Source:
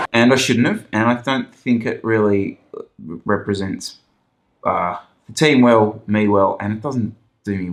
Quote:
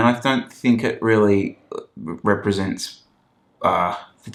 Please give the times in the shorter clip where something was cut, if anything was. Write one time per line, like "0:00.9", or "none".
none